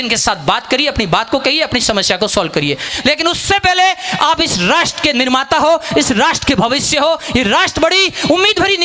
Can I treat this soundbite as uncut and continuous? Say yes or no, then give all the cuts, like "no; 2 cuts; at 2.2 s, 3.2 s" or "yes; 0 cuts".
no; 1 cut; at 2.9 s